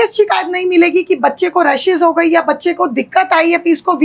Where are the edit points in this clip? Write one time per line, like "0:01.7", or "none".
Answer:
none